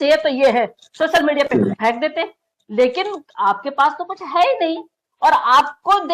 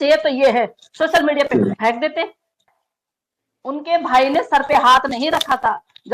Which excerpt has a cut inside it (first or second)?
second